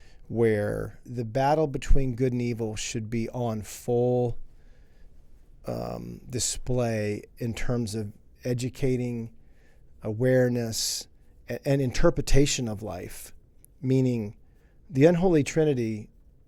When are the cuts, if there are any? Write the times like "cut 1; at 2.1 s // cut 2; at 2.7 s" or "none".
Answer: cut 1; at 1.0 s